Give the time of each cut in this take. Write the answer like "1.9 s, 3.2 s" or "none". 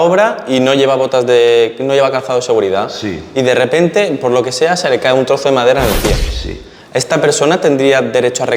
none